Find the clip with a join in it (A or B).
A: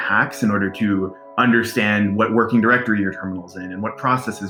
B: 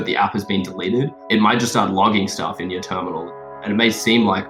B